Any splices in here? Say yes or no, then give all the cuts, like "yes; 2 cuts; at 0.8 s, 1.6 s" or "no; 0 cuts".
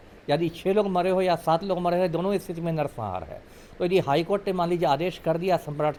no; 0 cuts